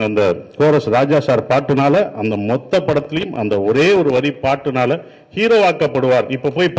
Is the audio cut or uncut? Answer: uncut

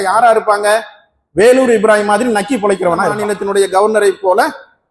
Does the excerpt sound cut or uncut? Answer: cut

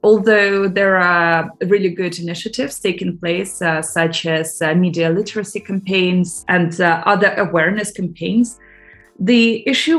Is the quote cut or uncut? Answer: cut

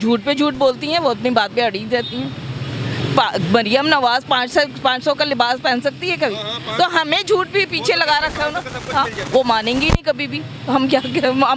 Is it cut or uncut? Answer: uncut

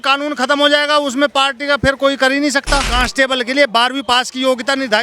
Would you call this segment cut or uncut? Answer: cut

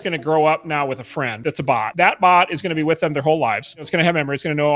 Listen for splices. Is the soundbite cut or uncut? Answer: cut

